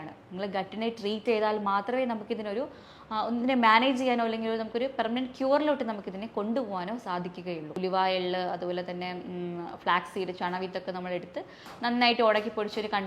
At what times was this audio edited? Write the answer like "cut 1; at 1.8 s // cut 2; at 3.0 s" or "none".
cut 1; at 7.8 s